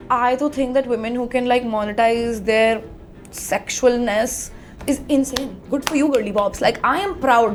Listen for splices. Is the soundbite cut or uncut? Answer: uncut